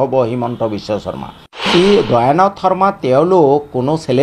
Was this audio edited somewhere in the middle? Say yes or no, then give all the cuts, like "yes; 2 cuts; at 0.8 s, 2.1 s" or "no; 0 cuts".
yes; 1 cut; at 1.6 s